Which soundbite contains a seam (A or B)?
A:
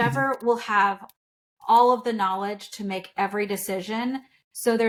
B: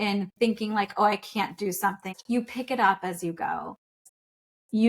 B